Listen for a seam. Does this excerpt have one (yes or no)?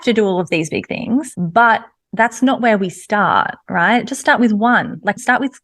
yes